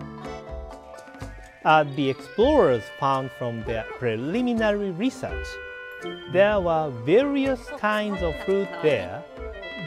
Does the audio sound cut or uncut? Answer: cut